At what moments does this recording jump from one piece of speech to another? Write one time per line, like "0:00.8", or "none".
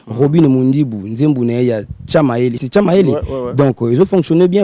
0:02.6